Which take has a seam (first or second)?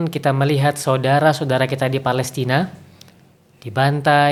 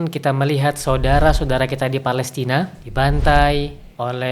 second